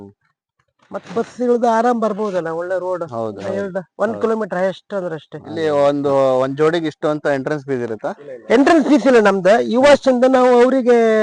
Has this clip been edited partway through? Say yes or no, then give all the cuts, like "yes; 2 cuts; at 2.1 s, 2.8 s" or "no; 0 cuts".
yes; 1 cut; at 5.4 s